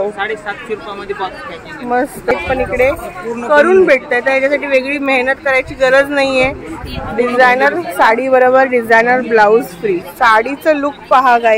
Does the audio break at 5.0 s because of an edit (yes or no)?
no